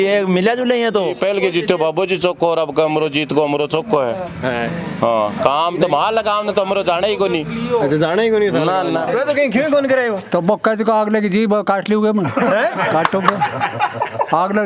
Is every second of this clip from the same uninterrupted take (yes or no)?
no